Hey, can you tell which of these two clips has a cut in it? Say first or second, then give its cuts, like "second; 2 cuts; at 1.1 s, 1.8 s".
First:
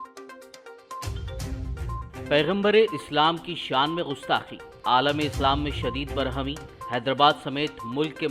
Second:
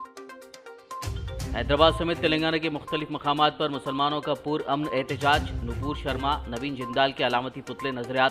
first; 1 cut; at 1.2 s